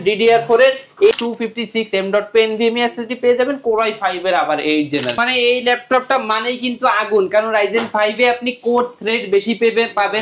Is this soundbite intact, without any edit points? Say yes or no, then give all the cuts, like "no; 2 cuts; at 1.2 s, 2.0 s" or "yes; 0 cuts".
no; 2 cuts; at 1.1 s, 5.2 s